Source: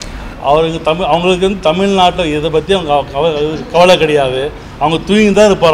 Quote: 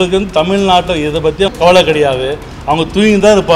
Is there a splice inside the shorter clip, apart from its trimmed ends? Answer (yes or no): yes